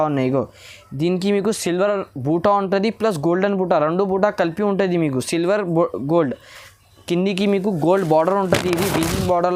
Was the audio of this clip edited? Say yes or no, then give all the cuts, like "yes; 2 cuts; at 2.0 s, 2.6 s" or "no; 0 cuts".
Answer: no; 0 cuts